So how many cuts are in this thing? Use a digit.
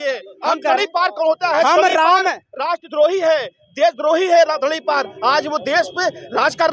0